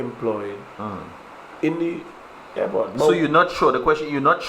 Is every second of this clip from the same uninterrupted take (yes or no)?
yes